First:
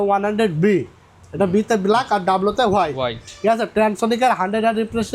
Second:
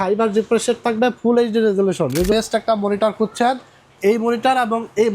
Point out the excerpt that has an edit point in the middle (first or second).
second